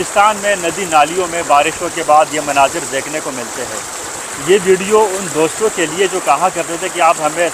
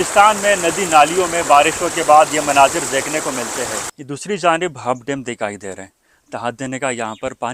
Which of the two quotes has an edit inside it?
second; 1 cut; at 3.9 s

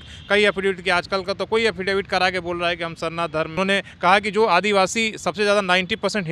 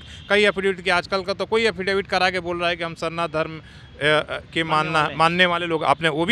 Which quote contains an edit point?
first; 1 cut; at 3.5 s

